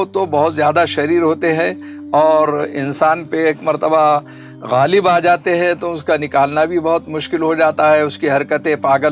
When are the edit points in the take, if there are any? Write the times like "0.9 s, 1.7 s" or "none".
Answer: none